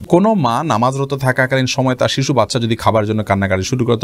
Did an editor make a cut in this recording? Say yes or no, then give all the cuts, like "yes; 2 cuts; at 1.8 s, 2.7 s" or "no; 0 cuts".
no; 0 cuts